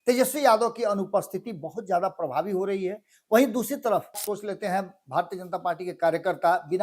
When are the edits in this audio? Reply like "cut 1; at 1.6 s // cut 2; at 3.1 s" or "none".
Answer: cut 1; at 4.2 s